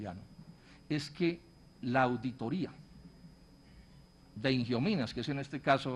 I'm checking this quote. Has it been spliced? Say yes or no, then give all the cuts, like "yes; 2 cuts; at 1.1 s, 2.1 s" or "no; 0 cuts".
no; 0 cuts